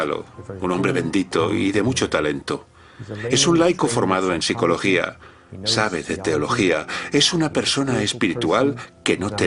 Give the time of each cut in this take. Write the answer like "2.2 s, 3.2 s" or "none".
none